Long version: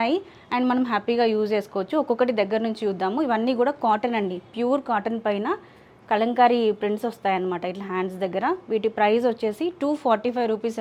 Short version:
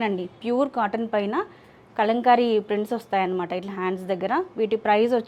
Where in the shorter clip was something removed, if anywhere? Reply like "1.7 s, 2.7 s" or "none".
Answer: none